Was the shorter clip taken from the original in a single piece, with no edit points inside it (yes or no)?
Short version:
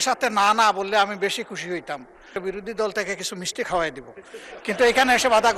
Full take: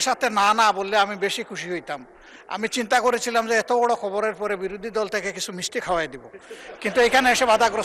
no